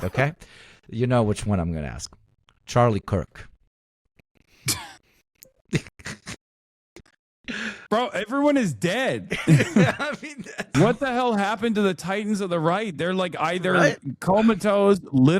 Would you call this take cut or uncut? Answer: cut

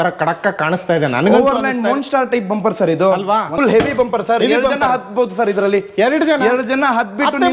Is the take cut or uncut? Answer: cut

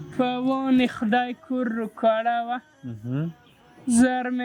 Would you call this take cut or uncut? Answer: uncut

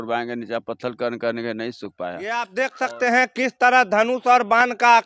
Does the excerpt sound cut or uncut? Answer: cut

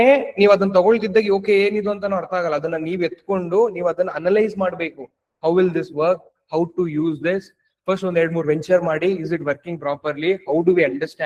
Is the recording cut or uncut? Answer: uncut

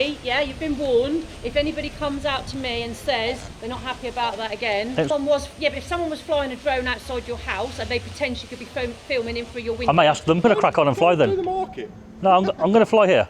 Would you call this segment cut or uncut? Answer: cut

